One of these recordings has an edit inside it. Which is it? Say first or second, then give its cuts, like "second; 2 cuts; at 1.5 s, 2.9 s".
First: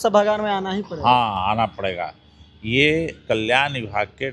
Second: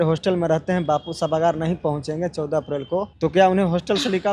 second; 1 cut; at 3.1 s